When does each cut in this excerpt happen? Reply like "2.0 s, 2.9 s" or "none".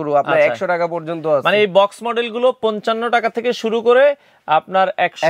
none